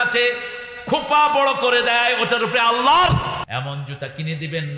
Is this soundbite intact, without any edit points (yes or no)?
no